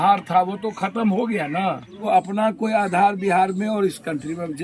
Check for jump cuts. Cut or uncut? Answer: cut